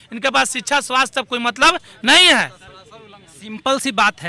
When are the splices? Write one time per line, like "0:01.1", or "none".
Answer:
none